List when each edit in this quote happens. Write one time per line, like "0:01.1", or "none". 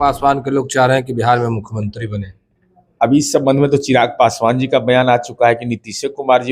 none

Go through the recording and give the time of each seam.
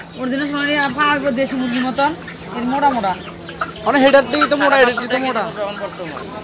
none

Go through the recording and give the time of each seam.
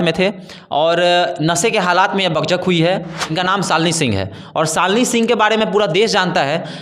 0:03.2

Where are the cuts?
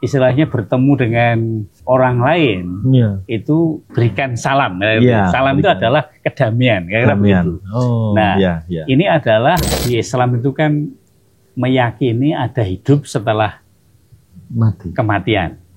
0:09.7

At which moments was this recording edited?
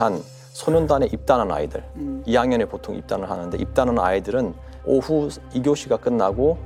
none

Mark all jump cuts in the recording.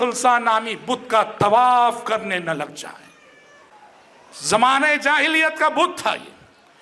none

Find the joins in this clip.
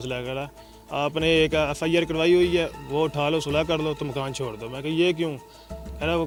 none

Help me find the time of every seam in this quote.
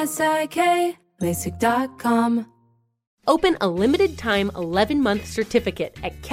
0:02.7

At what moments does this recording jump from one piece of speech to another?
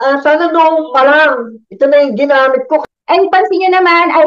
0:02.9

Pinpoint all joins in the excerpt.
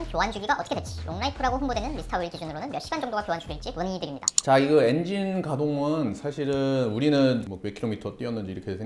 none

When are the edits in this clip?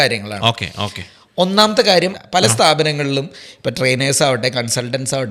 0:02.2

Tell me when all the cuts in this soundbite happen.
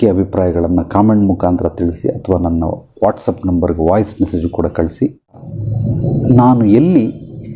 0:05.5

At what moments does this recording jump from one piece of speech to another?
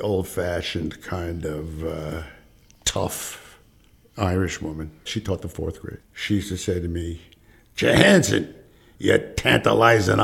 0:06.0

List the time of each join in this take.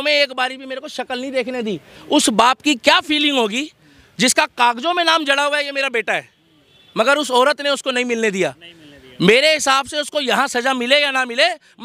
none

